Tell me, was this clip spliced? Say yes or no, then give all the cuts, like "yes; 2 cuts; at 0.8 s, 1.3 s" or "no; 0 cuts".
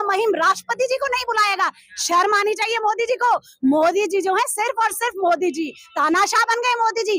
no; 0 cuts